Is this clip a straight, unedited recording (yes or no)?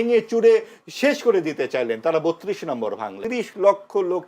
no